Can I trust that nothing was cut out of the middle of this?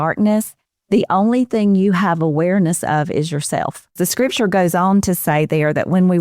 no; 1 cut; at 4.0 s

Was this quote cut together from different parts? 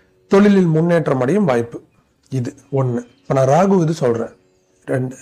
no; 0 cuts

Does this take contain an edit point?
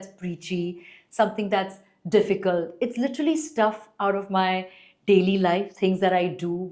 no; 0 cuts

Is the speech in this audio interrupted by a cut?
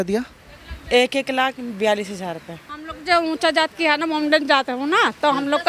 yes; 1 cut; at 2.9 s

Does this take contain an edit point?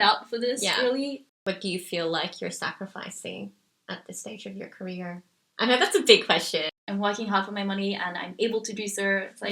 yes; 2 cuts; at 1.4 s, 6.8 s

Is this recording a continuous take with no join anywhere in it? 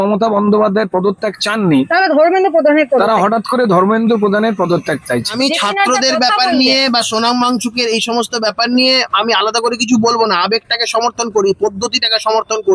no; 1 cut; at 5.3 s

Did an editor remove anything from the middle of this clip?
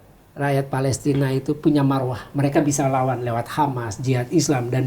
no; 0 cuts

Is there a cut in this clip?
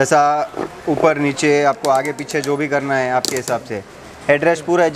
no; 0 cuts

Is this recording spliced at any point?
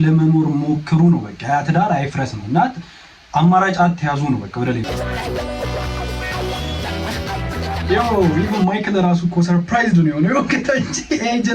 yes; 1 cut; at 4.9 s

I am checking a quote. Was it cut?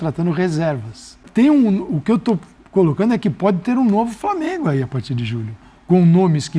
yes; 1 cut; at 1.2 s

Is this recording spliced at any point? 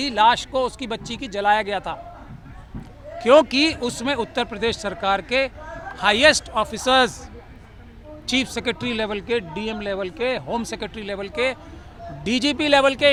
no; 0 cuts

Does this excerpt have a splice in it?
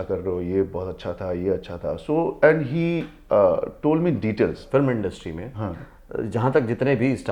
yes; 1 cut; at 4.6 s

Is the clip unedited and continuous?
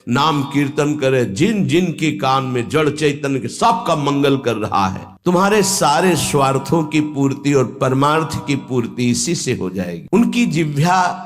no; 2 cuts; at 5.1 s, 10.0 s

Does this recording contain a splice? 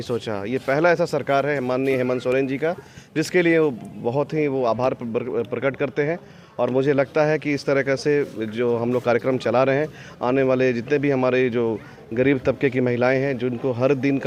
no; 0 cuts

